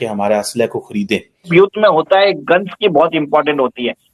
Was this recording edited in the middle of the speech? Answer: yes; 1 cut; at 1.5 s

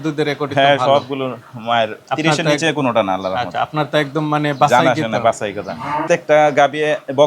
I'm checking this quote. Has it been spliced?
yes; 1 cut; at 6.0 s

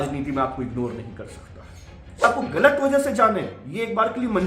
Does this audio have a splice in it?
yes; 1 cut; at 2.2 s

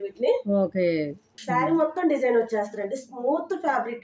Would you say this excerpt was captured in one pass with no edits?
no; 1 cut; at 1.4 s

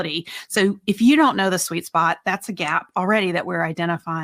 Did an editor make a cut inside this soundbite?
no; 0 cuts

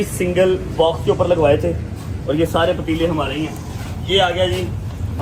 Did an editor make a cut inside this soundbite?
no; 0 cuts

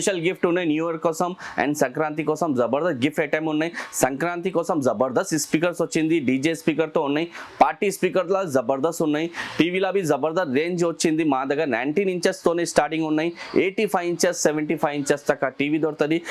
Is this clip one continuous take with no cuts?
yes; 0 cuts

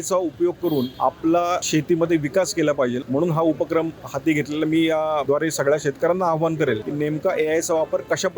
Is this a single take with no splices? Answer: no; 5 cuts; at 0.9 s, 1.6 s, 3.0 s, 5.2 s, 6.9 s

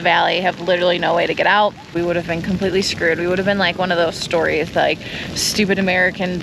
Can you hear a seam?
yes; 1 cut; at 1.9 s

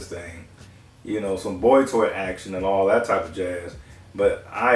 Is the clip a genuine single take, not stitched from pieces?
yes; 0 cuts

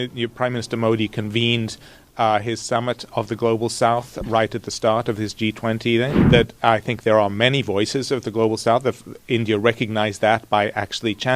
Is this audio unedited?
no; 1 cut; at 6.2 s

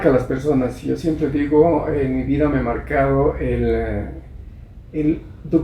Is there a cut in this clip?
no; 0 cuts

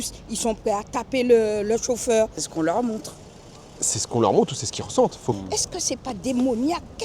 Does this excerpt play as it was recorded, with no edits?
no; 2 cuts; at 2.4 s, 5.3 s

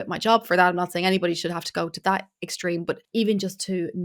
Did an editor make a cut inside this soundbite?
yes; 1 cut; at 3.0 s

